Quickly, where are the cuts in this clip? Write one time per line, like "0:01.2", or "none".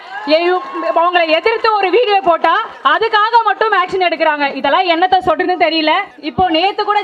0:02.7
0:06.2